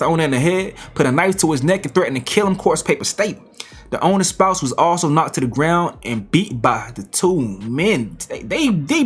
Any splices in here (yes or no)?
no